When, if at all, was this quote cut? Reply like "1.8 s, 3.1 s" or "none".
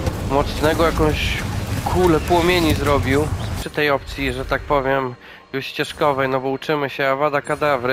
3.6 s